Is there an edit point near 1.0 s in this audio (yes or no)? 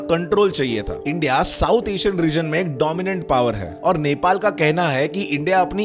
yes